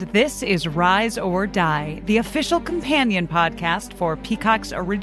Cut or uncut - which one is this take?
uncut